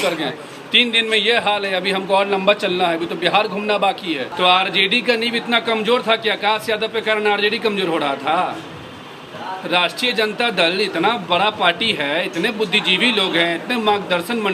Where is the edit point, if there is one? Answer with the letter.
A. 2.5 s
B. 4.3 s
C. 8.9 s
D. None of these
B